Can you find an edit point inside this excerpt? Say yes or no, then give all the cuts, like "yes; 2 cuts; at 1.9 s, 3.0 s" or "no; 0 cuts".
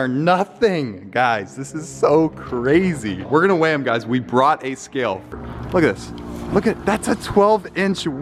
no; 0 cuts